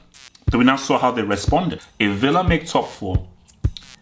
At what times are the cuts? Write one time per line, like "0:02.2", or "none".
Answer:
0:01.8